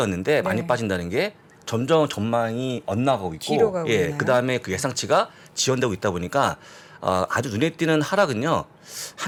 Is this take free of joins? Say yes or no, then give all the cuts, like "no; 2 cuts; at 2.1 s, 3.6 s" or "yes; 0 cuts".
yes; 0 cuts